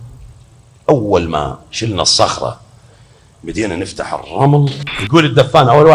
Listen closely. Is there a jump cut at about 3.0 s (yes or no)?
no